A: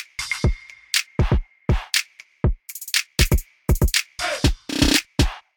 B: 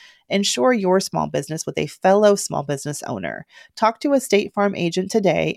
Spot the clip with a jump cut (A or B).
A